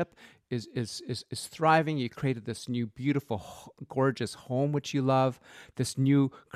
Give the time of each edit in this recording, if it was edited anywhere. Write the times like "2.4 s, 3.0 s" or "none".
none